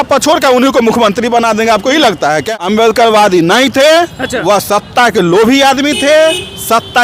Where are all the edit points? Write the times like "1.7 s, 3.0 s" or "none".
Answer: 2.5 s